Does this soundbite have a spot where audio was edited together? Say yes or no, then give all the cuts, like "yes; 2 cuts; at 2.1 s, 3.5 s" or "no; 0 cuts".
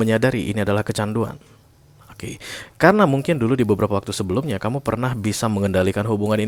no; 0 cuts